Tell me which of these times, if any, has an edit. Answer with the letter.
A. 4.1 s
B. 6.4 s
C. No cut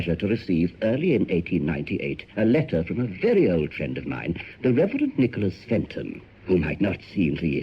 A